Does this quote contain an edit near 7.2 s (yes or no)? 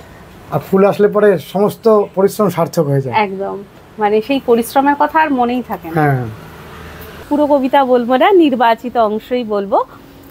yes